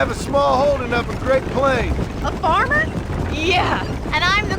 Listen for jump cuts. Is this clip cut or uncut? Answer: uncut